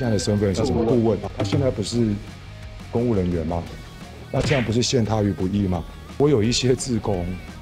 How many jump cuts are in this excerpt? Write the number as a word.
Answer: two